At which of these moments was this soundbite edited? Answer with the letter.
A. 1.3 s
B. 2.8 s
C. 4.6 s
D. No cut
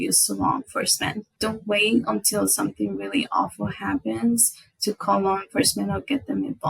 A